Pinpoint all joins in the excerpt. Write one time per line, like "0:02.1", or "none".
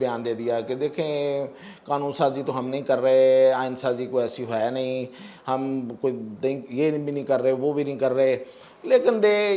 none